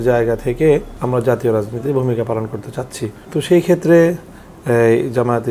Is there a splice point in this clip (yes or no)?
yes